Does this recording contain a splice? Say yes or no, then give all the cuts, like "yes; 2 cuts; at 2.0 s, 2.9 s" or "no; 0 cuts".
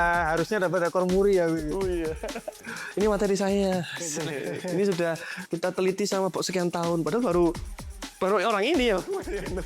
yes; 2 cuts; at 2.5 s, 5.3 s